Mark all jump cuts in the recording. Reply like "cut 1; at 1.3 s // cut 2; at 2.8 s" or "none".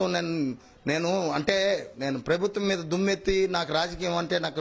none

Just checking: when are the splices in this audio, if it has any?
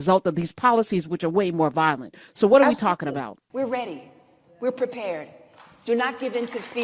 cut 1; at 3.4 s

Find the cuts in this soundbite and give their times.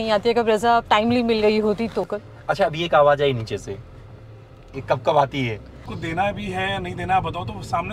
cut 1; at 2.0 s // cut 2; at 5.9 s

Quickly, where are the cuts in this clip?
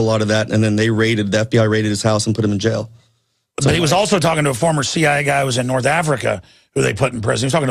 none

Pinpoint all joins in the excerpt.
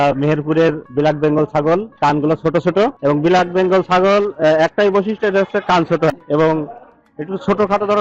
cut 1; at 0.8 s // cut 2; at 1.9 s // cut 3; at 3.0 s // cut 4; at 6.1 s

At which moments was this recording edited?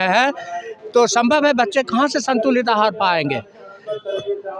none

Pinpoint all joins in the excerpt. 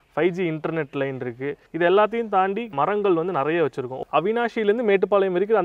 cut 1; at 1.6 s // cut 2; at 2.7 s // cut 3; at 4.0 s

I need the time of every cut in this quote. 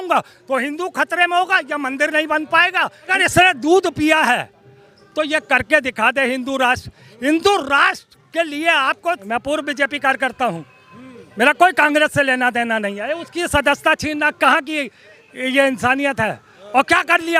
cut 1; at 3.1 s // cut 2; at 9.2 s

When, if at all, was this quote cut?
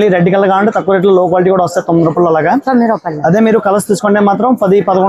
none

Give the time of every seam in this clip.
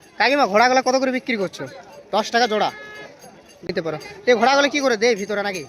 cut 1; at 3.7 s

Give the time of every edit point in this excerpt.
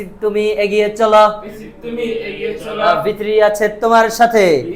none

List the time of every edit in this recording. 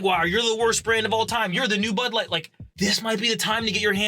cut 1; at 2.6 s

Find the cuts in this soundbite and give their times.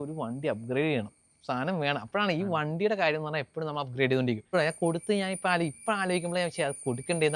cut 1; at 4.5 s

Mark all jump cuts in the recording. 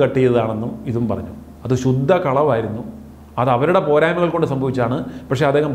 none

